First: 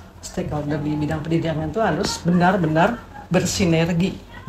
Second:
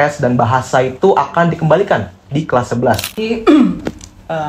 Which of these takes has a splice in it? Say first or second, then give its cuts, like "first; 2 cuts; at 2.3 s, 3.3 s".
second; 1 cut; at 3.1 s